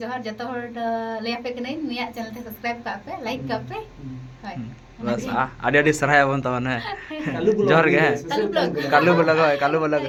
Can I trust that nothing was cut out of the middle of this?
yes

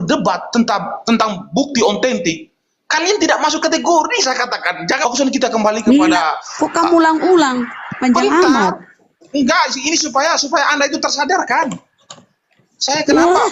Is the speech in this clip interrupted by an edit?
yes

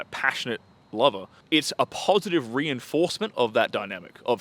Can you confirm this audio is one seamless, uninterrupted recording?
no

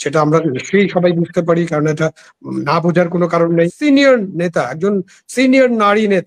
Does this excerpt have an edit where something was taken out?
yes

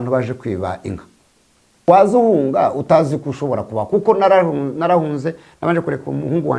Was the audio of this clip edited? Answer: yes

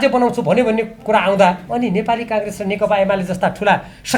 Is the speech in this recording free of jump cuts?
no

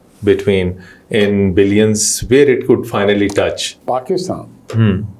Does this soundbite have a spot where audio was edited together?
yes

